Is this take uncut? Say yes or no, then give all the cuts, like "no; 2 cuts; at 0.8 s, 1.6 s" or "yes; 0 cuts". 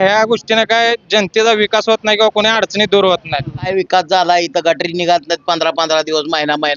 no; 1 cut; at 3.7 s